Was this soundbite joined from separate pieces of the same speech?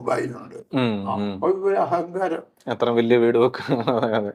no; 0 cuts

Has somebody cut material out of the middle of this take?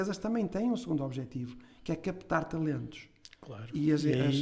no; 0 cuts

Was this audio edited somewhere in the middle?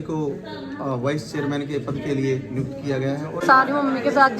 yes; 1 cut; at 3.4 s

